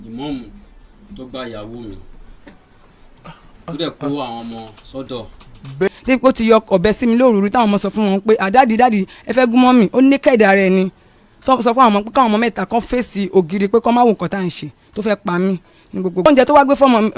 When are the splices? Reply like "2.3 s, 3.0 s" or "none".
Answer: 5.9 s, 16.3 s